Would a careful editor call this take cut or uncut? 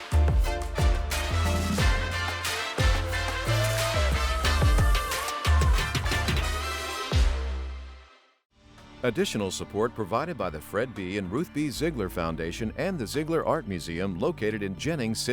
cut